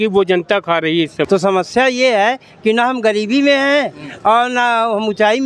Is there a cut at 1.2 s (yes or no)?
yes